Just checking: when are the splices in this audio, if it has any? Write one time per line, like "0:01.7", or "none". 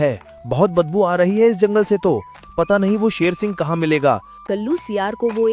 0:04.4